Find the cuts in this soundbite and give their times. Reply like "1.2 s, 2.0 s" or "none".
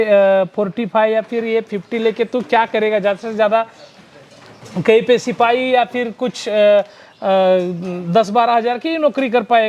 none